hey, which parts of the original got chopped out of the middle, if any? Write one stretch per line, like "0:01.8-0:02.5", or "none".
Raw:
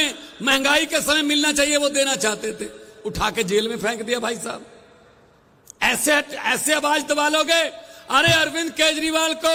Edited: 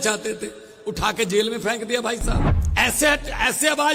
0:04.7-0:05.6